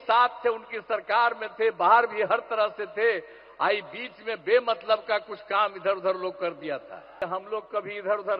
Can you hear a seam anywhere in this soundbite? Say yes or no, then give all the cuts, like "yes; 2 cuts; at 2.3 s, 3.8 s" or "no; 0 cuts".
yes; 1 cut; at 7.2 s